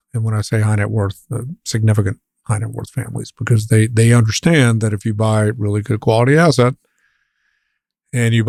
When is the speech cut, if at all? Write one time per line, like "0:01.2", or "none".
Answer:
none